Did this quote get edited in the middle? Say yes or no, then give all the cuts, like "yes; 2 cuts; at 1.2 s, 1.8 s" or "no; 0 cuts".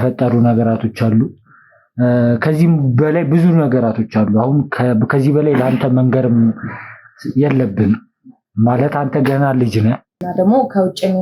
yes; 1 cut; at 10.2 s